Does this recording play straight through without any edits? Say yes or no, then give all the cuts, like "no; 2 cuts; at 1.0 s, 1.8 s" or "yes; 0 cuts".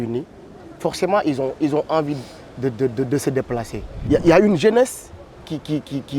no; 1 cut; at 4.0 s